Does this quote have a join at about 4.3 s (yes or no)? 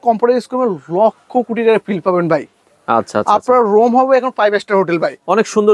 no